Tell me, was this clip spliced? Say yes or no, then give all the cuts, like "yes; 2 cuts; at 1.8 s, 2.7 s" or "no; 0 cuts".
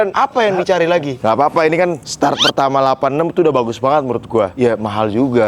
yes; 2 cuts; at 1.1 s, 4.5 s